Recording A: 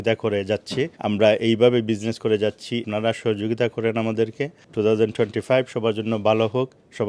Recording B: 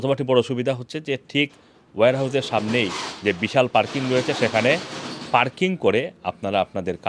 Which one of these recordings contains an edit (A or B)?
A